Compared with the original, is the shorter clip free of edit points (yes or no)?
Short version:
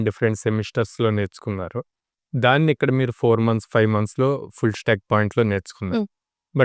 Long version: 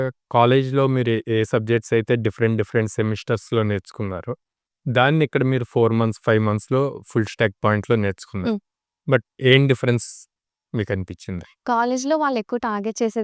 yes